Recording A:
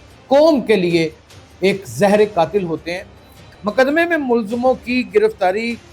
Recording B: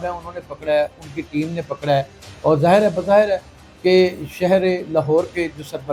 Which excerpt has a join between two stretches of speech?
A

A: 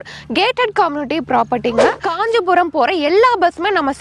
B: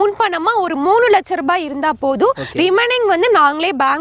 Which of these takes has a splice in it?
A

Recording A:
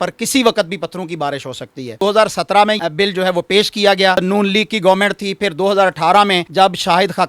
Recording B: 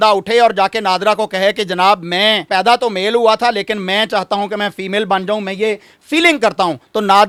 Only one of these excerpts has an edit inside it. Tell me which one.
A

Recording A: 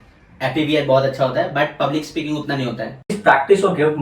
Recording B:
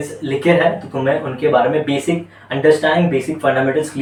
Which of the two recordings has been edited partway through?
A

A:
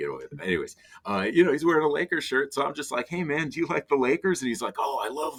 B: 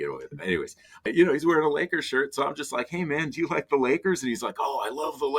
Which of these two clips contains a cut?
B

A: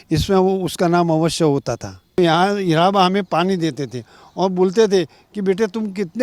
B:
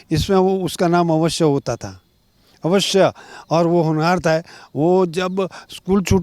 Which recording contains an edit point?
A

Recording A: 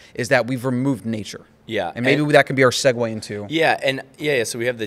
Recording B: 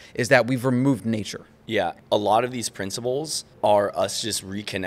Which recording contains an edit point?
B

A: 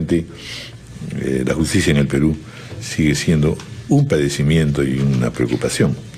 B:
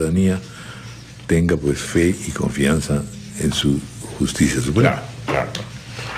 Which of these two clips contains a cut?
B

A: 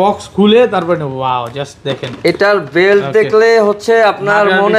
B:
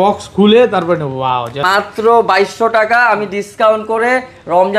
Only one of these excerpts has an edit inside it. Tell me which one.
B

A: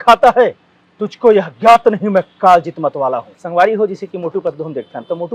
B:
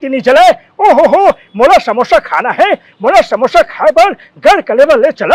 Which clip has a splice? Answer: A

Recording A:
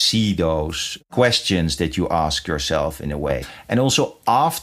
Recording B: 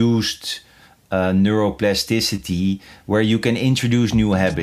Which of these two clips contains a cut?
A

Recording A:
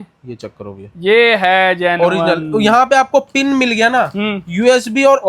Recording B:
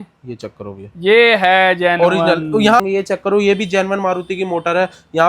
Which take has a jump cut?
B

